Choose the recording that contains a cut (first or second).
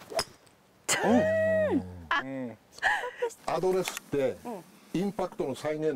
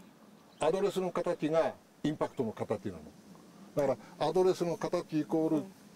first